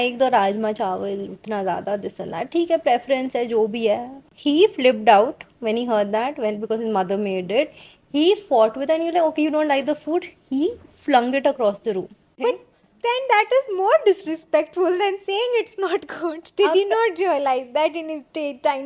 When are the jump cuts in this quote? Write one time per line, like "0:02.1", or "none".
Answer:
0:12.2